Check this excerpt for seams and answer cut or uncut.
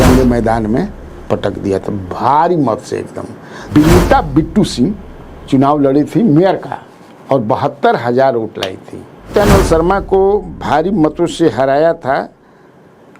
cut